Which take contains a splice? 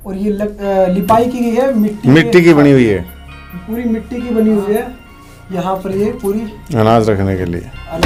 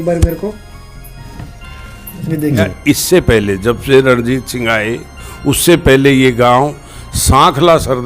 second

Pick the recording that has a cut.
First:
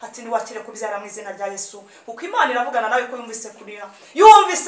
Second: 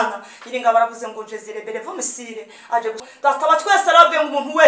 second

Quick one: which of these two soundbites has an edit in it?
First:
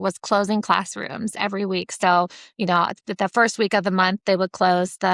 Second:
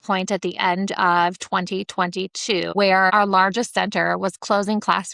second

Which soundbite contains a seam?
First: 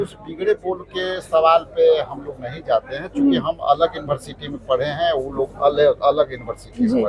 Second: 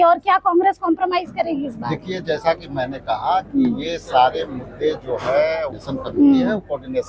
second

